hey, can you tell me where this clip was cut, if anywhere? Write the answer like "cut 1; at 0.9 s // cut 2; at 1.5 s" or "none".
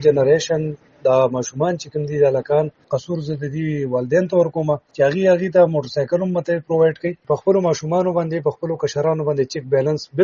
cut 1; at 2.9 s // cut 2; at 4.9 s // cut 3; at 7.2 s

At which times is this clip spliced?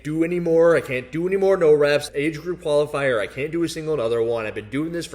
none

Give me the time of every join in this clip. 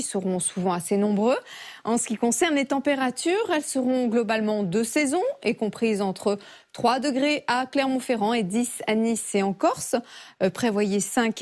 cut 1; at 7.4 s

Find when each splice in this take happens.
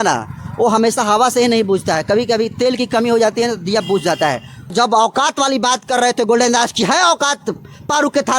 cut 1; at 4.7 s

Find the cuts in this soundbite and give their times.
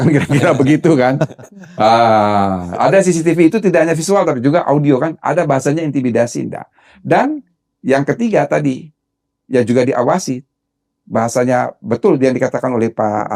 none

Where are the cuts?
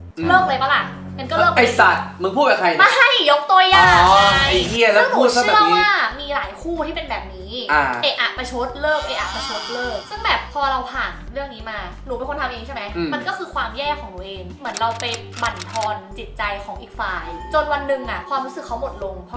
none

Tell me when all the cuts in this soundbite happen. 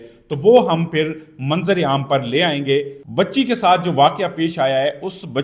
cut 1; at 3.0 s

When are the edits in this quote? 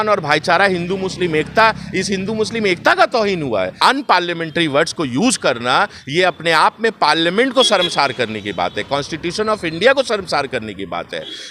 cut 1; at 3.7 s

